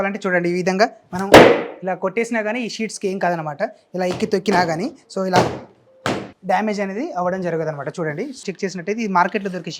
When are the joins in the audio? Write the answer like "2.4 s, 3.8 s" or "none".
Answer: 8.4 s

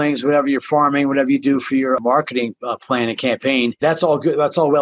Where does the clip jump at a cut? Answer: 2.0 s, 3.8 s

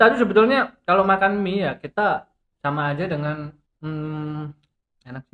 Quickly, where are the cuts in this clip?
2.4 s, 3.6 s

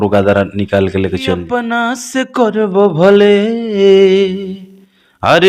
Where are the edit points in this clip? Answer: 1.4 s

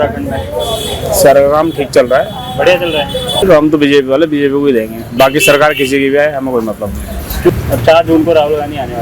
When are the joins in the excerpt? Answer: 3.4 s, 7.5 s

